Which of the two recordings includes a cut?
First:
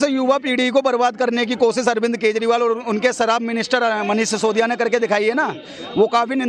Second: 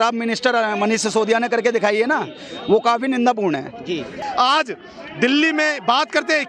second; 1 cut; at 4.2 s

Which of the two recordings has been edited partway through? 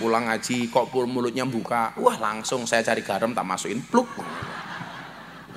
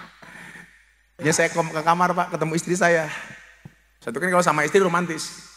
second; 1 cut; at 1.2 s

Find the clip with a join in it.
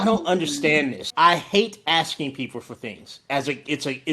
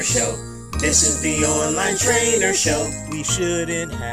first; 1 cut; at 1.0 s

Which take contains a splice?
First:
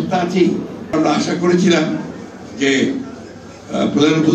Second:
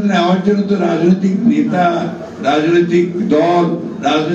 first; 1 cut; at 0.9 s

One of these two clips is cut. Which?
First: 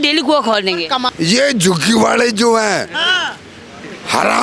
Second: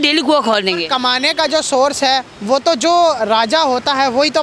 first; 1 cut; at 1.1 s

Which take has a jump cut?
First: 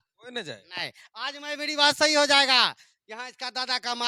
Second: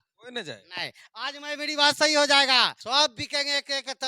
second; 1 cut; at 2.8 s

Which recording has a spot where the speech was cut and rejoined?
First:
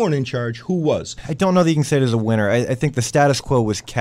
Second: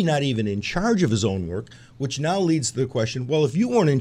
first; 1 cut; at 1.2 s

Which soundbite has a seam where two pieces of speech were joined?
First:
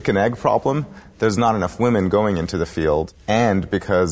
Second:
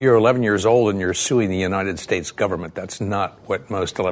first; 1 cut; at 3.1 s

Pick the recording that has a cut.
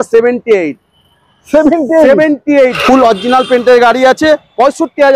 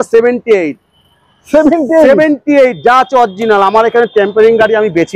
first; 1 cut; at 2.8 s

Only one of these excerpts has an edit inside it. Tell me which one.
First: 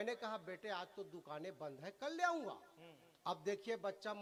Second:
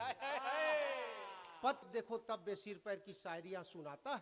second; 1 cut; at 1.8 s

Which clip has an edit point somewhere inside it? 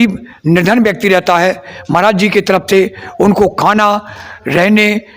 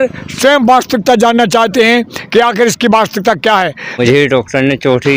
second; 1 cut; at 4.0 s

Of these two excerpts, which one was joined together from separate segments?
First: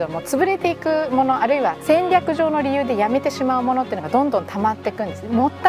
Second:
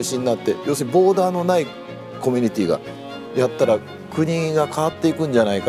first; 1 cut; at 1.8 s

